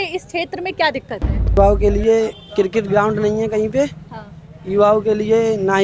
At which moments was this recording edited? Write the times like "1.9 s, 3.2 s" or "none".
1.6 s